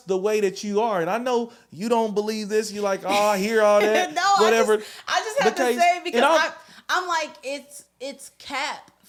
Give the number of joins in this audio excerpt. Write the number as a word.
zero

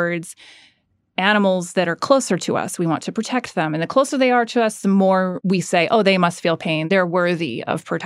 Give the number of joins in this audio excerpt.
two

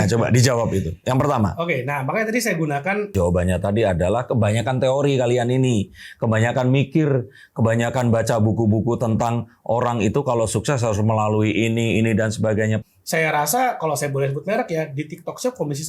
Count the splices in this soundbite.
two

